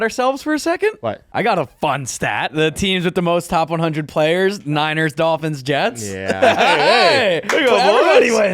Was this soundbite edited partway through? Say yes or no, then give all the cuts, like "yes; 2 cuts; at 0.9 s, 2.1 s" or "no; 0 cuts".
yes; 2 cuts; at 1.2 s, 2.5 s